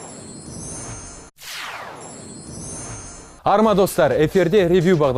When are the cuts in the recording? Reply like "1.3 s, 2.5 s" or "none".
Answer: none